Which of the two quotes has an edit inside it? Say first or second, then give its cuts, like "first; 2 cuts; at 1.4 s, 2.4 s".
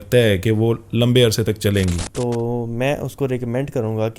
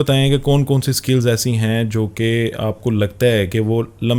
first; 1 cut; at 2.0 s